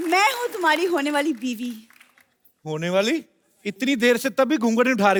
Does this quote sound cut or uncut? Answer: uncut